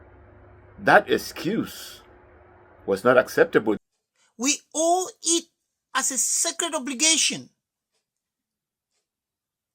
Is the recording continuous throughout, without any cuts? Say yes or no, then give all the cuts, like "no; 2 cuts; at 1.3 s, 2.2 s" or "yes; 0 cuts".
no; 1 cut; at 3.8 s